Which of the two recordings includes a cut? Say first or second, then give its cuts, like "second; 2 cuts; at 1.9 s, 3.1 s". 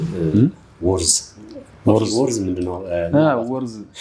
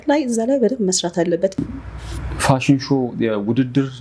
second; 1 cut; at 1.7 s